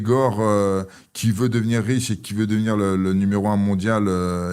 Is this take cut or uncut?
uncut